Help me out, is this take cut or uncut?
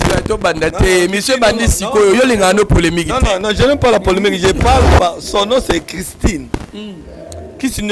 uncut